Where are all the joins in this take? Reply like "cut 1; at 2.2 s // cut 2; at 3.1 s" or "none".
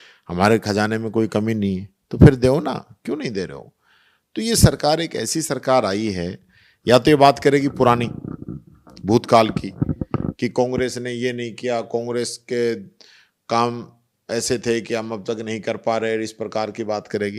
none